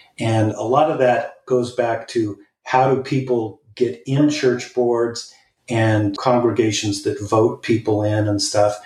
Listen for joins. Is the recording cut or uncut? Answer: cut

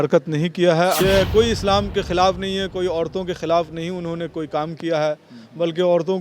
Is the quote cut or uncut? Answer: cut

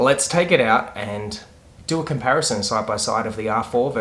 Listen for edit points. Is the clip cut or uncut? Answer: uncut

